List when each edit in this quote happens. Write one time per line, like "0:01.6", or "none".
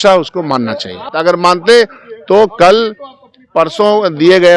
0:01.1